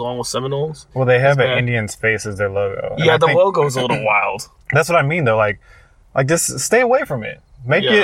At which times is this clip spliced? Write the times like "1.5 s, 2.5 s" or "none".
none

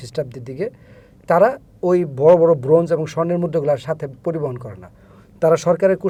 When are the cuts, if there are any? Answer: none

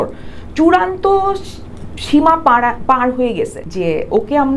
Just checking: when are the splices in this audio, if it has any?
3.6 s

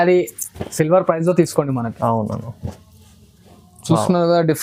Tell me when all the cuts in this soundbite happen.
none

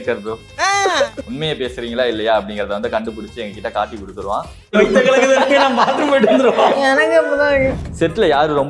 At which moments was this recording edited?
4.6 s, 7.8 s

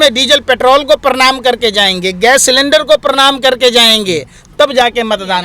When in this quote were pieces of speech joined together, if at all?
none

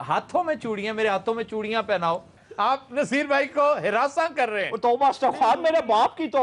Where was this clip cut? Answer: 2.4 s

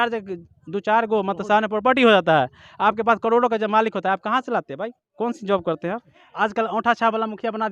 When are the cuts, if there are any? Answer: 6.2 s

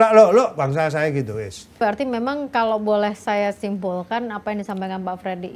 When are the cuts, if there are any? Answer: 1.6 s

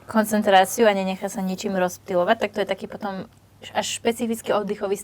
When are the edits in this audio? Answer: none

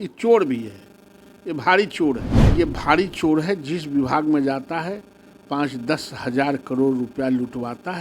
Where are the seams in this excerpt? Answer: 2.3 s

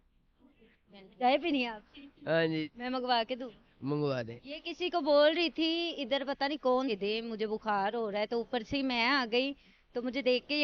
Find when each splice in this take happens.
1.2 s, 6.9 s

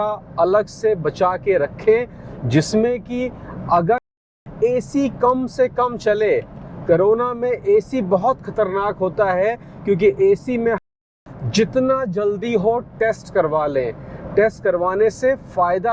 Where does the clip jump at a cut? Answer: 4.3 s, 10.9 s

